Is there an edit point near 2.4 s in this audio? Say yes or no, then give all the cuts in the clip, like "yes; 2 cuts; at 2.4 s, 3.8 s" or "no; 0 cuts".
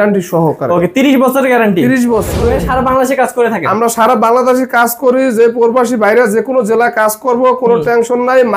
yes; 1 cut; at 2.4 s